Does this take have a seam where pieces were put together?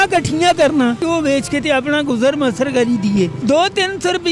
yes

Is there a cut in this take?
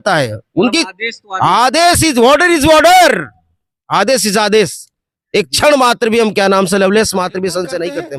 no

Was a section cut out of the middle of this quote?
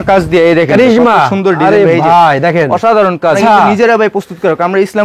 yes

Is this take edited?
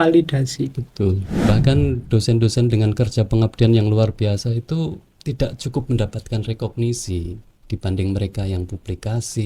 yes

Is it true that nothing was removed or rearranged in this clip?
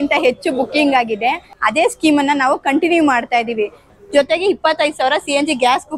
no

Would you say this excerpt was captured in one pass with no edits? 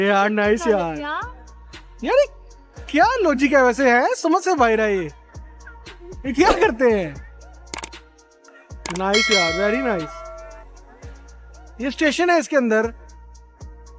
yes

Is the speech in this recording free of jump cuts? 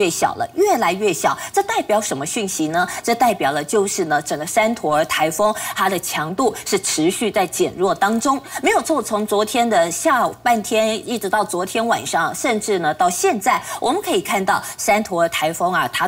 yes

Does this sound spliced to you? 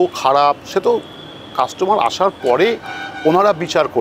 no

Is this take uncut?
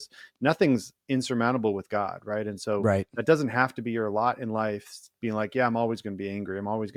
yes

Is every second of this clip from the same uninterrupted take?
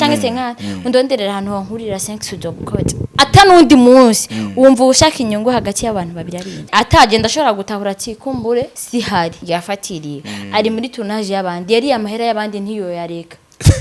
no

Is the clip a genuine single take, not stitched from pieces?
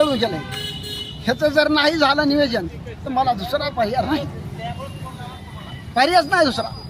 yes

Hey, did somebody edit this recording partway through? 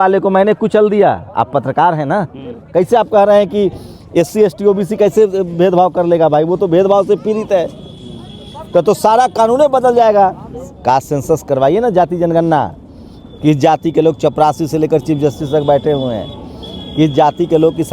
yes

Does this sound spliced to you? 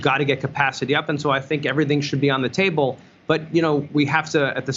no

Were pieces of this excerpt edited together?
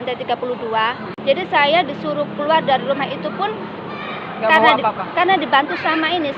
yes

